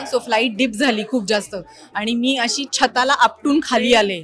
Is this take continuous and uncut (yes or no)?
yes